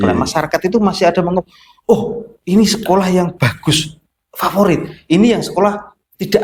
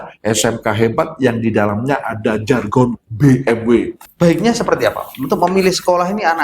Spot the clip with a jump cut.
second; 1 cut; at 4.0 s

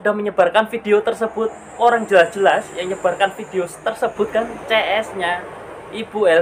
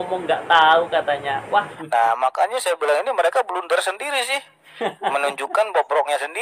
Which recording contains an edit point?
second; 1 cut; at 1.8 s

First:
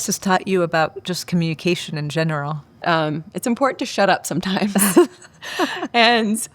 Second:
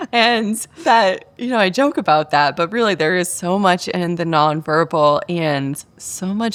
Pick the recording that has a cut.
first; 1 cut; at 2.8 s

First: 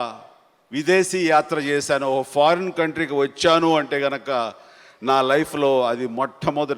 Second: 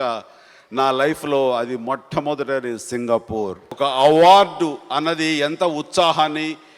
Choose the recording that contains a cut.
second; 1 cut; at 3.7 s

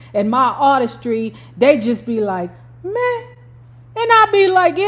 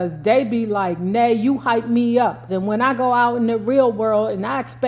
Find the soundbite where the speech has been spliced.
second; 1 cut; at 2.5 s

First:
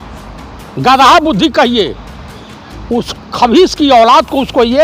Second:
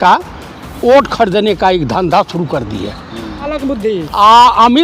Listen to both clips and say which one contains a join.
second; 1 cut; at 3.5 s

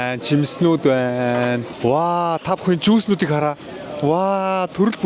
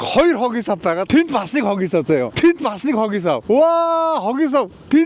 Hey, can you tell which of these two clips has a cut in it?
second; 1 cut; at 1.1 s

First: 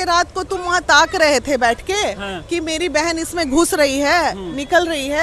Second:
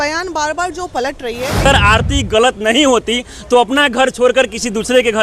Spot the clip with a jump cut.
second; 1 cut; at 1.7 s

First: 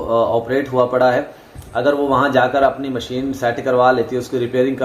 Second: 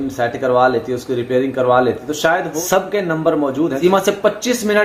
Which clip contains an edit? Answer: second; 2 cuts; at 2.6 s, 3.8 s

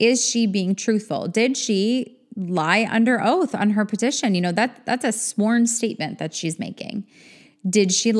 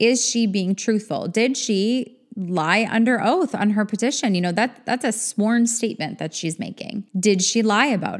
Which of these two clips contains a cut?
second; 1 cut; at 7.1 s

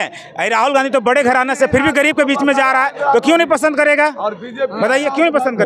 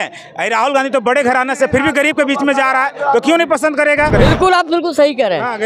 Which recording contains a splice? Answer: second; 1 cut; at 4.1 s

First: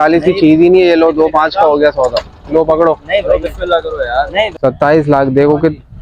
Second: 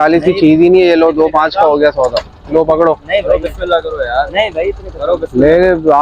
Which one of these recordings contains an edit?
first; 1 cut; at 4.5 s

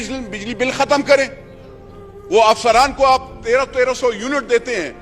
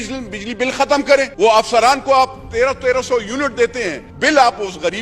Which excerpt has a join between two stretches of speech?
second; 2 cuts; at 1.3 s, 4.0 s

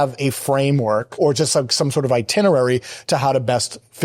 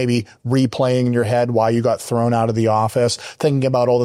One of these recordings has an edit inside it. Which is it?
first; 1 cut; at 1.1 s

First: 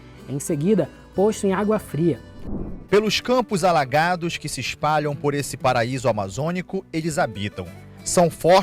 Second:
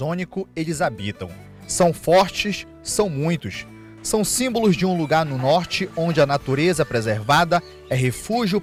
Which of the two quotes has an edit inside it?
first; 1 cut; at 2.3 s

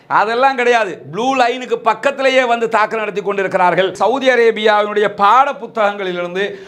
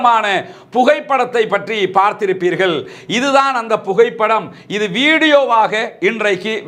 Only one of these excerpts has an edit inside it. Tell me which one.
first; 1 cut; at 3.9 s

